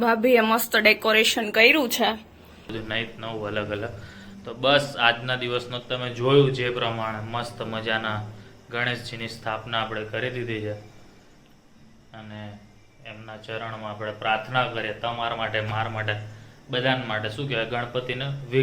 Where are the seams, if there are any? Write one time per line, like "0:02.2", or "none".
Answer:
0:02.7